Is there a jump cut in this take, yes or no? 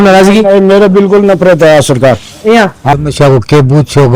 yes